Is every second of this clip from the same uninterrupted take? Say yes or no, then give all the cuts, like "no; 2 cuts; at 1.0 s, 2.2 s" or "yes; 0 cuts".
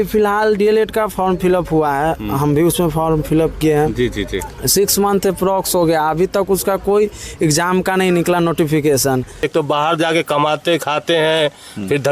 no; 1 cut; at 9.5 s